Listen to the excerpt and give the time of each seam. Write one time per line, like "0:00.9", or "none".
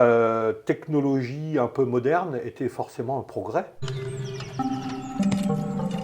0:03.8